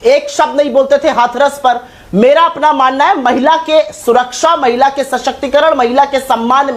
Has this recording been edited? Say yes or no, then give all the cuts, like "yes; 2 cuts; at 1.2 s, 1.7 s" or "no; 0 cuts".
no; 0 cuts